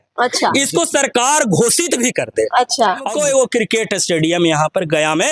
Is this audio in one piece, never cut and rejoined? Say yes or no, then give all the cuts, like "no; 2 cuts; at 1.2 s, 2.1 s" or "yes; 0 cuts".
no; 1 cut; at 3.1 s